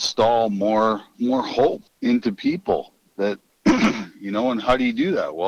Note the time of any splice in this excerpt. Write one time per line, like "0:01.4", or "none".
0:01.1
0:01.9
0:03.5

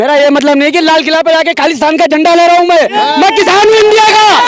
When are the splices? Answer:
none

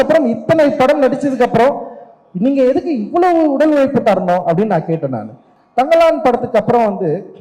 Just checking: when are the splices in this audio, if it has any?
0:05.4

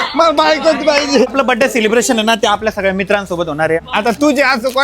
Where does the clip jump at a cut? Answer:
0:01.3
0:03.8

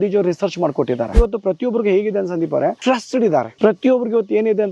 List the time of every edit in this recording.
0:01.1
0:02.9

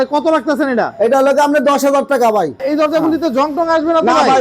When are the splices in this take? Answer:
0:02.7

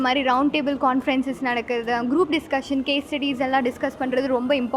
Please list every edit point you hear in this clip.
none

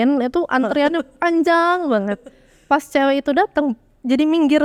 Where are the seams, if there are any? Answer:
none

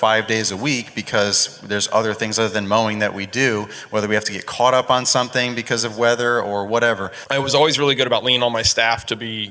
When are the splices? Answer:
0:07.1

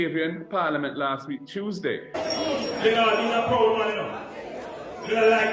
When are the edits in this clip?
0:02.1

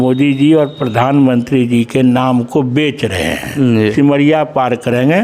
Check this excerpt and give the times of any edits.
0:03.9

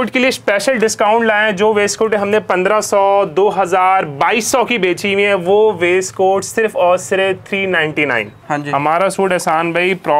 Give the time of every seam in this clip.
0:08.3

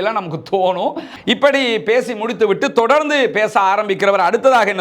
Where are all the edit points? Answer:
0:01.1

